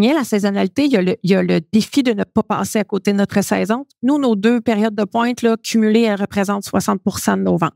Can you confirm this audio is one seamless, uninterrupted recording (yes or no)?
yes